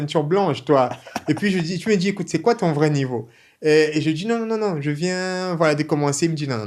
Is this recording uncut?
yes; 0 cuts

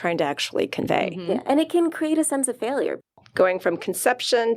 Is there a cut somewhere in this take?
yes; 1 cut; at 3.1 s

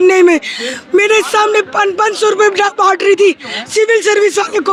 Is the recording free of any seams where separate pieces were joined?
yes; 0 cuts

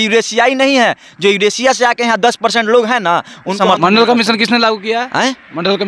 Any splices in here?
yes; 1 cut; at 3.5 s

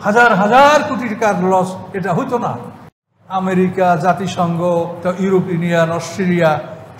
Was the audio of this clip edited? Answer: yes; 1 cut; at 2.9 s

